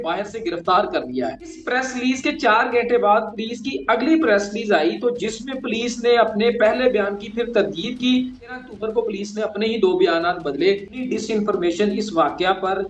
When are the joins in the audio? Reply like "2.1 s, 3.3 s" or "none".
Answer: 1.6 s, 8.6 s, 11.1 s